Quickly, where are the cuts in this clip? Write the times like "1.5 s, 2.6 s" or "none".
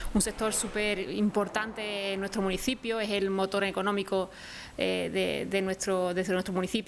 none